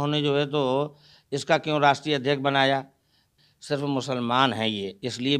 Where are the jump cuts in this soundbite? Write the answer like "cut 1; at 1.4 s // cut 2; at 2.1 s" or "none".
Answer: cut 1; at 3.3 s